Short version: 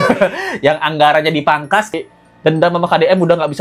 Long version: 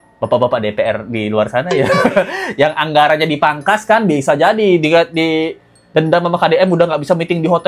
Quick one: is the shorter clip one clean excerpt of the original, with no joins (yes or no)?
no